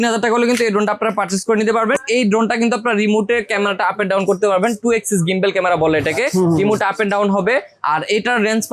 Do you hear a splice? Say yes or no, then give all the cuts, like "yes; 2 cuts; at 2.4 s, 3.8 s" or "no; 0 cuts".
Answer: yes; 1 cut; at 2.0 s